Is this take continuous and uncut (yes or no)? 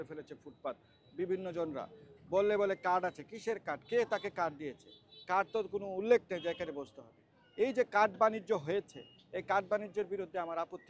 yes